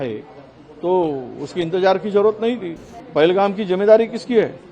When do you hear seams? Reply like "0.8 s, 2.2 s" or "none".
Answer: 2.9 s